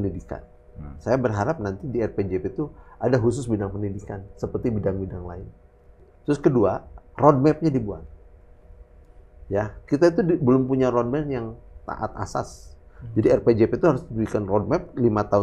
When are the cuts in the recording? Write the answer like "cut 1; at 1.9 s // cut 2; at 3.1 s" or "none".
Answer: cut 1; at 6.0 s